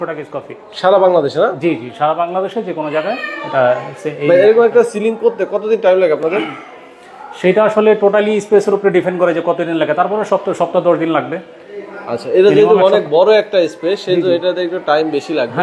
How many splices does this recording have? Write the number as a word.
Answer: zero